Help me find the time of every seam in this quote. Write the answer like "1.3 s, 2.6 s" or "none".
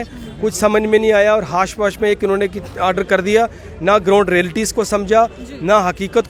none